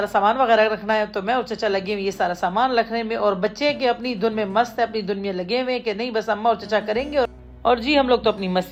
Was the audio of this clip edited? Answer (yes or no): no